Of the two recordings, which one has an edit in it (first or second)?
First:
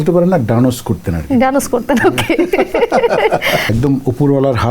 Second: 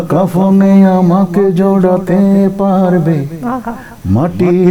first